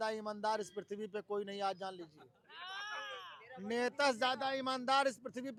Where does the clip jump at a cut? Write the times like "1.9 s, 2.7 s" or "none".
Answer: none